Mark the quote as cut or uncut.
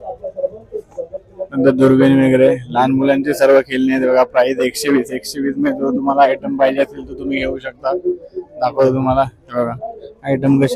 uncut